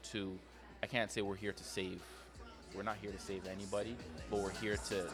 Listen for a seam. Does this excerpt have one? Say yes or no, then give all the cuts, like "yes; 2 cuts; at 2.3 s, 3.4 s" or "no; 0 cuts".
no; 0 cuts